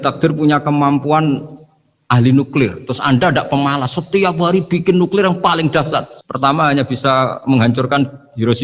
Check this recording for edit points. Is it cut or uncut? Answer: uncut